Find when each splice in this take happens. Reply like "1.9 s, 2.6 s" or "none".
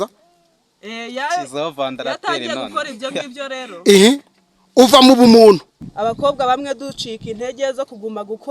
5.9 s

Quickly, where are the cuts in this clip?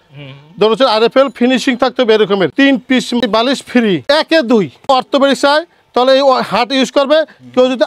2.5 s, 4.0 s, 4.8 s

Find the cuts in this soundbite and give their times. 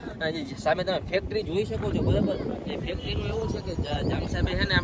none

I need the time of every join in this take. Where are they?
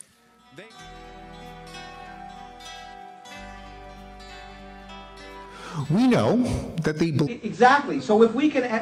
none

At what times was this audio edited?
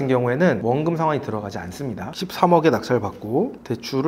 2.1 s

